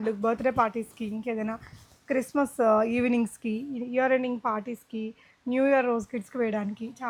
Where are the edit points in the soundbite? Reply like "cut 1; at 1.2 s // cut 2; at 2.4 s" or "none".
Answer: none